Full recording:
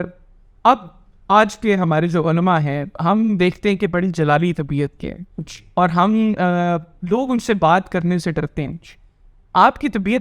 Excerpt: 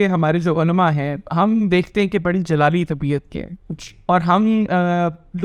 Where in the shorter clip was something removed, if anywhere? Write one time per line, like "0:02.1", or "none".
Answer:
none